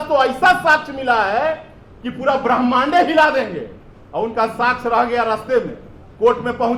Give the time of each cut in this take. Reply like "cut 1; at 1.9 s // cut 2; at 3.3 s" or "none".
none